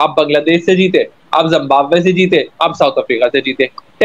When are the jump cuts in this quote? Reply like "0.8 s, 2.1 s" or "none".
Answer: none